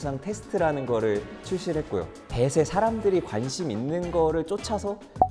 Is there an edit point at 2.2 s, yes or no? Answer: yes